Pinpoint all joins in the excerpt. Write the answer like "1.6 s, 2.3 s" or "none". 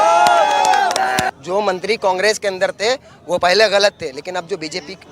1.3 s